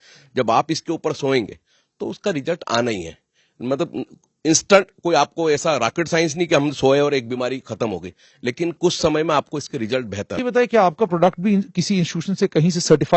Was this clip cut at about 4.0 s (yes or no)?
no